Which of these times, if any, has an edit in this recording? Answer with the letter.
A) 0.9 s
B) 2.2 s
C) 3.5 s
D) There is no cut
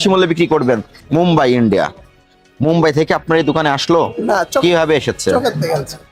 A